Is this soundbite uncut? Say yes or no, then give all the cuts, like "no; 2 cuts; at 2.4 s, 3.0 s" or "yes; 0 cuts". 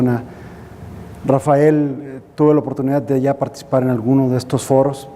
yes; 0 cuts